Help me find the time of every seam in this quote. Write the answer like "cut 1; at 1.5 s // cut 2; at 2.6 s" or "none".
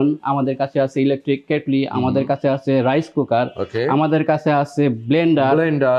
none